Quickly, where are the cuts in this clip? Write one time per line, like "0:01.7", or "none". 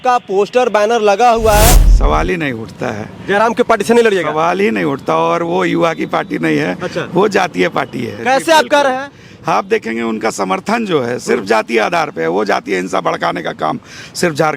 0:01.9
0:08.1